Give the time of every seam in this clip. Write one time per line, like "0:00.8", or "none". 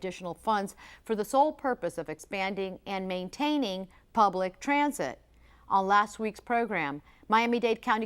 0:02.4